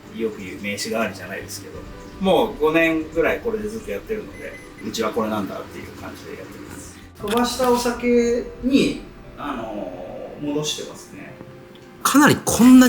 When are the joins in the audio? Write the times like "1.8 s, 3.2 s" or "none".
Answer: none